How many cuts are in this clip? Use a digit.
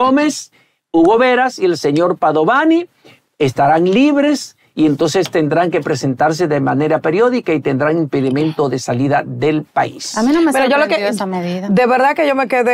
0